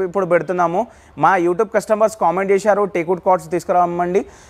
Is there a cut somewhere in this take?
no; 0 cuts

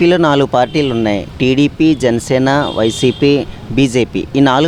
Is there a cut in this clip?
no; 0 cuts

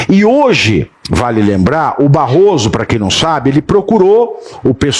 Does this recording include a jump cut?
yes; 1 cut; at 1.0 s

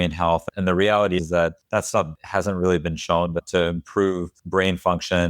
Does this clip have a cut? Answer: yes; 2 cuts; at 2.0 s, 4.3 s

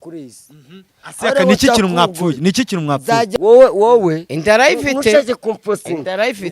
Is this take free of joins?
no; 1 cut; at 3.3 s

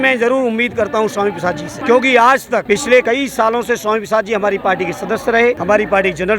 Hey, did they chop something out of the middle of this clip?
yes; 3 cuts; at 1.8 s, 2.8 s, 5.6 s

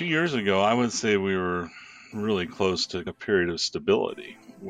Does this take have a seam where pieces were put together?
no; 0 cuts

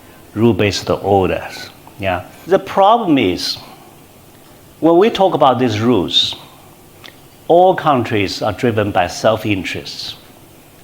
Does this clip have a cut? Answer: yes; 1 cut; at 2.3 s

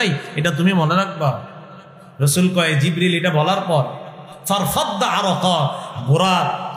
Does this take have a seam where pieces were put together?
no; 0 cuts

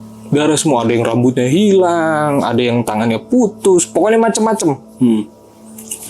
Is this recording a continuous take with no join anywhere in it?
yes; 0 cuts

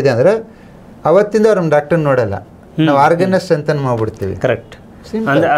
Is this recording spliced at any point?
no; 0 cuts

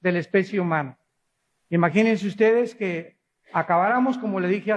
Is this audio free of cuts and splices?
yes; 0 cuts

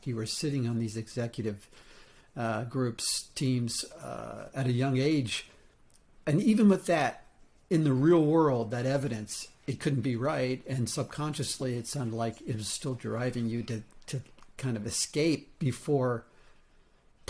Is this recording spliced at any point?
no; 0 cuts

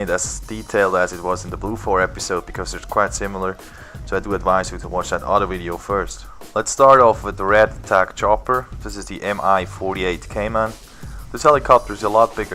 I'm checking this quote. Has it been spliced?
yes; 1 cut; at 8.3 s

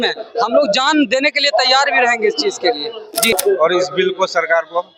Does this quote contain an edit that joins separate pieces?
yes; 1 cut; at 3.3 s

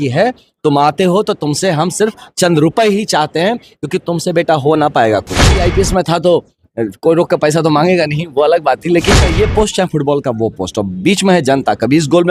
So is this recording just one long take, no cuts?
no; 2 cuts; at 5.6 s, 9.3 s

